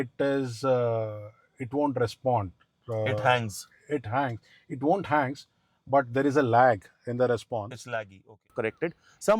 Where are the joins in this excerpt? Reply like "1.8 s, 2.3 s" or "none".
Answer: 8.5 s